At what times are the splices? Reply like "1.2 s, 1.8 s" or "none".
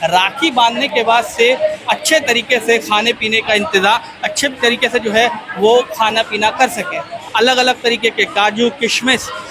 7.2 s